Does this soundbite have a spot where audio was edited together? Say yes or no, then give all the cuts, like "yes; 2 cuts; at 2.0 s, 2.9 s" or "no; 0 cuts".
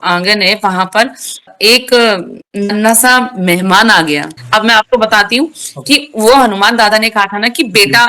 yes; 1 cut; at 4.4 s